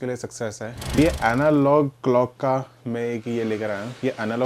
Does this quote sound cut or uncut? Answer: cut